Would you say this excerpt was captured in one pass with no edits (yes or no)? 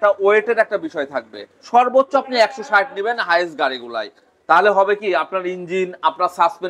yes